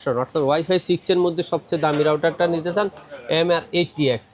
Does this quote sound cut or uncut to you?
uncut